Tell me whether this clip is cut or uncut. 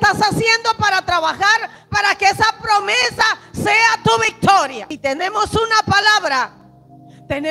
cut